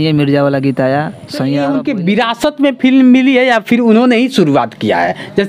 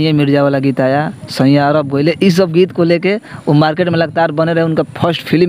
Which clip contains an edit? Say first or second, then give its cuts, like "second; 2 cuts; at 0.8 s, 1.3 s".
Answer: first; 1 cut; at 1.6 s